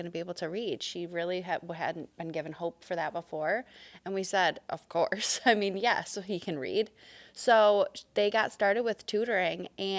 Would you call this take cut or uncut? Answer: uncut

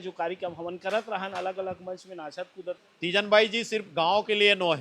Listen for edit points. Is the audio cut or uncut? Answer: cut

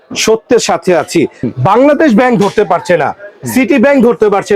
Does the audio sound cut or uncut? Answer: cut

